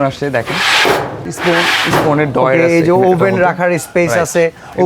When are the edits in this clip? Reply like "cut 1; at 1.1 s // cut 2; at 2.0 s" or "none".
cut 1; at 1.2 s